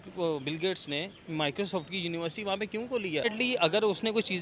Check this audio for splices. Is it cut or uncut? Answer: cut